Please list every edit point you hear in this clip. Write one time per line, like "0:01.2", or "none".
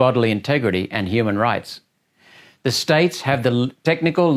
none